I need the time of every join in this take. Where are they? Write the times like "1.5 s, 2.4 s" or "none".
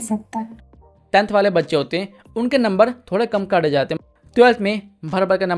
0.9 s, 4.0 s